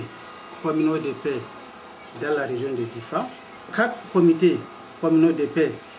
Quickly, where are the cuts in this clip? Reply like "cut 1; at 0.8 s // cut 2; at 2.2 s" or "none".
cut 1; at 4.0 s